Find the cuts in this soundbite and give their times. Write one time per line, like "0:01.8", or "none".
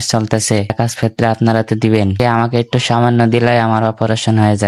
0:00.7
0:02.2